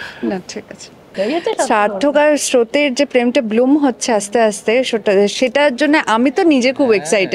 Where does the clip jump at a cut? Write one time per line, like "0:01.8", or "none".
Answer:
0:01.1